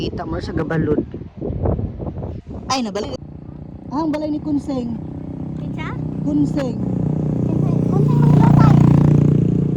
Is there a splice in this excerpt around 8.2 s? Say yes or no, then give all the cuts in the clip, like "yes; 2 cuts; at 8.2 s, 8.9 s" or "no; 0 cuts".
no; 1 cut; at 3.3 s